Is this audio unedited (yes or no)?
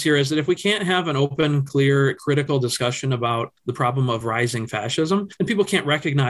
yes